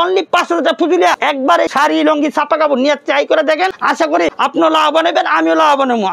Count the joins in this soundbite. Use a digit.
2